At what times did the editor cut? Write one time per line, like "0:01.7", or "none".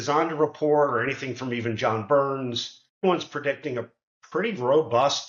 0:03.0